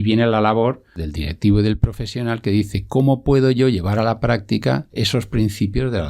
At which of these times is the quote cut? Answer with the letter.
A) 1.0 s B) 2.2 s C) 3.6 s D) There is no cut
A